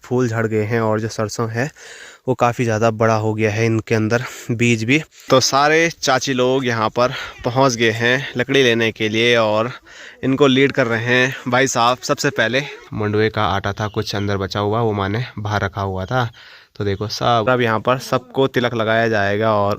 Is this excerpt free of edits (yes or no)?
no